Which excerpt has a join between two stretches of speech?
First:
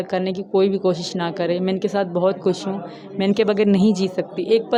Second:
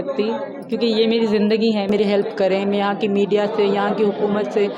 second; 1 cut; at 1.9 s

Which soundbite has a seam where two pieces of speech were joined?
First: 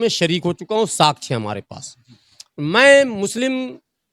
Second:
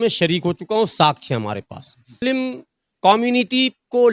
second; 1 cut; at 2.1 s

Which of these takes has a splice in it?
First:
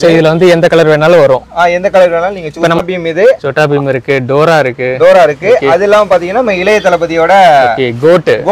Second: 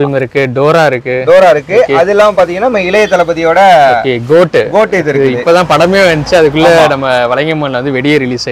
first; 1 cut; at 2.8 s

